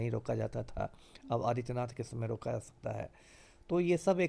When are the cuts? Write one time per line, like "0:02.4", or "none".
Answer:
none